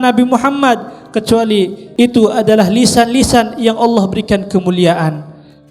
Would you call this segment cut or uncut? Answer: cut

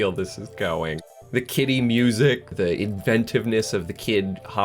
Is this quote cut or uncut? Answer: cut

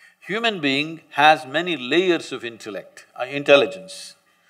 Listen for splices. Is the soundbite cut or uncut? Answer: uncut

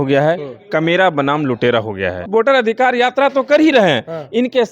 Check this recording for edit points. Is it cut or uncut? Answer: cut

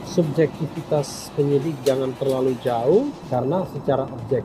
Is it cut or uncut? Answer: cut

